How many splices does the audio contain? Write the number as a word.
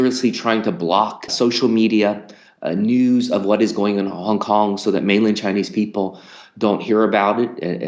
one